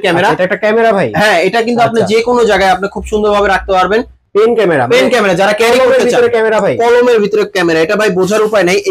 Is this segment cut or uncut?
cut